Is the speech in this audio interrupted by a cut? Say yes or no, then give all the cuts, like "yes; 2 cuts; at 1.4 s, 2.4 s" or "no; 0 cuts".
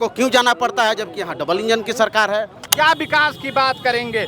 yes; 1 cut; at 2.6 s